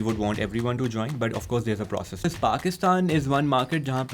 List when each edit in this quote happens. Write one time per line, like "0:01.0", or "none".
0:02.2